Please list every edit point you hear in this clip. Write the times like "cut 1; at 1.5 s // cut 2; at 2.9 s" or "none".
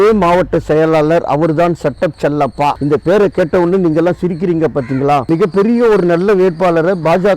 cut 1; at 5.3 s